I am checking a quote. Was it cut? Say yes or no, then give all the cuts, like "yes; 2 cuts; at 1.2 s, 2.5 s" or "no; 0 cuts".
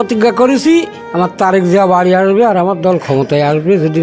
yes; 1 cut; at 1.0 s